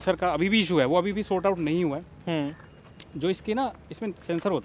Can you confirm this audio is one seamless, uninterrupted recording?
yes; 0 cuts

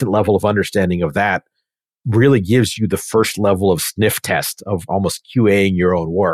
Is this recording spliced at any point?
no; 0 cuts

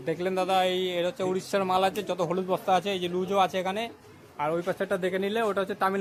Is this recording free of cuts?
yes; 0 cuts

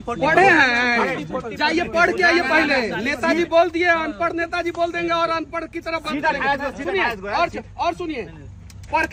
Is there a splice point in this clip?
no; 0 cuts

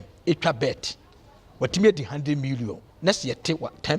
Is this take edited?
no; 0 cuts

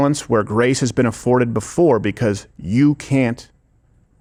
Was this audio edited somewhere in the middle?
no; 0 cuts

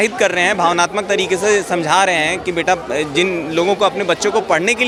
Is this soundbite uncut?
yes; 0 cuts

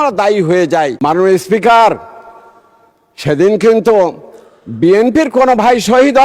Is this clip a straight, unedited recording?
no; 1 cut; at 0.9 s

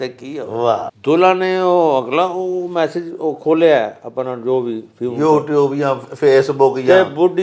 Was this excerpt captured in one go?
no; 1 cut; at 0.9 s

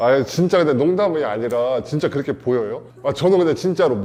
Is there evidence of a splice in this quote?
no; 0 cuts

